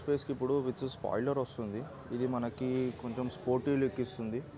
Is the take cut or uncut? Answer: uncut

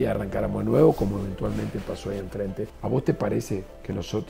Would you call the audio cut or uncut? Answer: cut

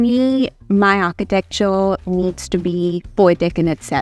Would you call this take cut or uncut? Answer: cut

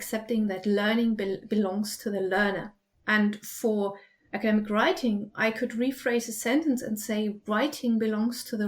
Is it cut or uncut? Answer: uncut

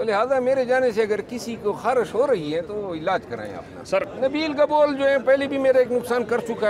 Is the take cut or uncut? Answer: cut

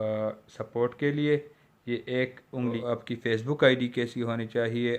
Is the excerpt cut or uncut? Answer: cut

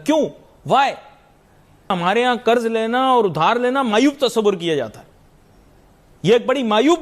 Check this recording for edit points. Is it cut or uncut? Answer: cut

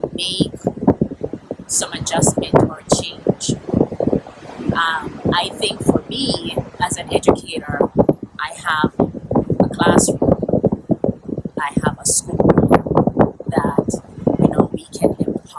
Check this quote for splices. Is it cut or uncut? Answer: uncut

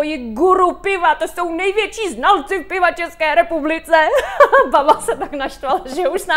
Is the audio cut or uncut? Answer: uncut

